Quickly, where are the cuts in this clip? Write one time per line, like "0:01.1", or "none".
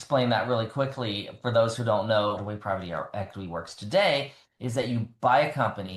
0:02.4